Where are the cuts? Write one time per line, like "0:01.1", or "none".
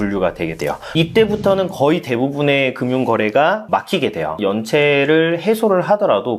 0:00.8
0:04.3